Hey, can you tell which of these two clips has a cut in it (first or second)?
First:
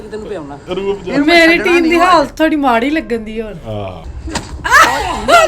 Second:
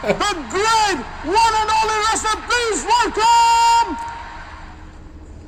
first